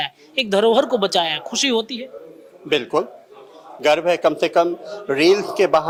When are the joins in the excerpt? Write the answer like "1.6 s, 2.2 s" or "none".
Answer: none